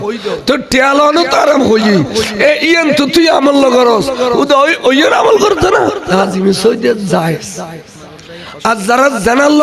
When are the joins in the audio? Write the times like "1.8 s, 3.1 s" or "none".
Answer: 6.0 s